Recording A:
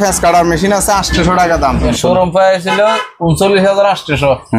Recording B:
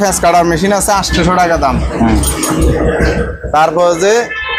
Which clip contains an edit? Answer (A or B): A